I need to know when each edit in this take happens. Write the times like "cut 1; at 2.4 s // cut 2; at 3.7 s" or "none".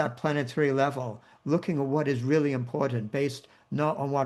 none